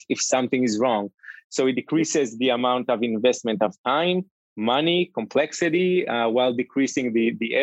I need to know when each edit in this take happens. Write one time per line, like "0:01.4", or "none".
none